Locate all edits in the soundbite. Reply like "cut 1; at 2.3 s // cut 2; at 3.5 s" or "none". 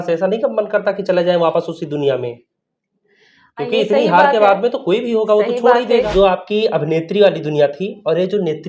cut 1; at 6.1 s

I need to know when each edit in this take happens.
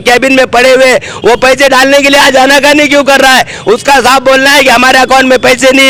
none

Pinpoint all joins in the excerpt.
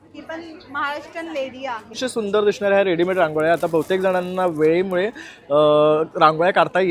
cut 1; at 2.0 s

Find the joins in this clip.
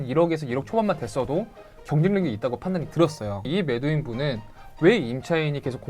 cut 1; at 3.5 s

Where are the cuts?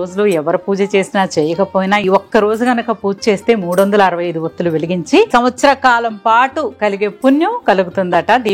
cut 1; at 2.0 s // cut 2; at 5.3 s

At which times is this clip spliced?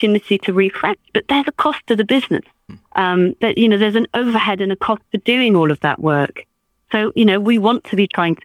none

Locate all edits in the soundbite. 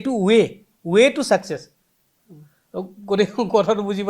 none

